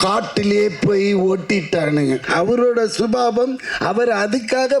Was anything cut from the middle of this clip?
yes; 1 cut; at 2.2 s

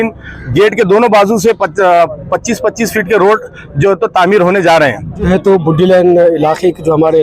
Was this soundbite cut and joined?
yes; 1 cut; at 5.2 s

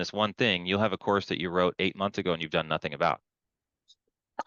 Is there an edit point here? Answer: no; 0 cuts

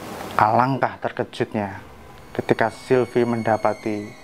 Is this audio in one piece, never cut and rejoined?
yes; 0 cuts

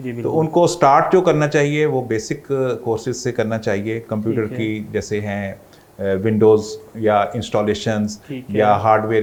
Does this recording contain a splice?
no; 0 cuts

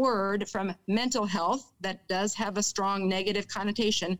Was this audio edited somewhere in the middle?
no; 0 cuts

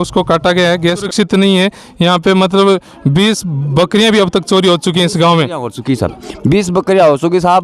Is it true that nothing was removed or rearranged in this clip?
no; 1 cut; at 1.1 s

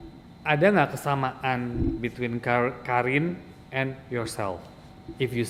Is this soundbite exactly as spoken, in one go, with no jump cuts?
yes; 0 cuts

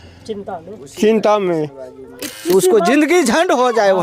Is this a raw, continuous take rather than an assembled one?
no; 1 cut; at 2.3 s

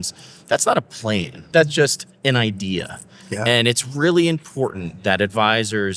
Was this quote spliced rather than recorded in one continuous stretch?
yes; 1 cut; at 1.5 s

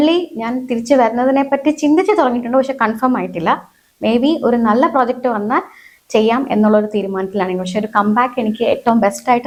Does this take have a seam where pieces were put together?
no; 0 cuts

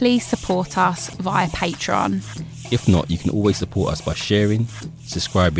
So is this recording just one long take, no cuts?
yes; 0 cuts

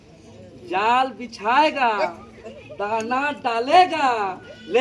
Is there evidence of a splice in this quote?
no; 0 cuts

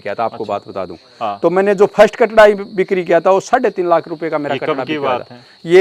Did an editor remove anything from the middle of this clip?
no; 0 cuts

